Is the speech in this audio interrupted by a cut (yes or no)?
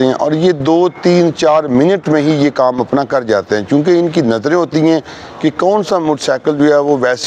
no